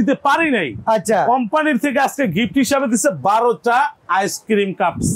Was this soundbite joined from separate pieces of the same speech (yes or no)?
no